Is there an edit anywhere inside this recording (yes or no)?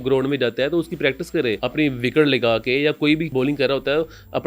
yes